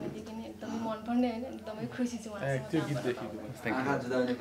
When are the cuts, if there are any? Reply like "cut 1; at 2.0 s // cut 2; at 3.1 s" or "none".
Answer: none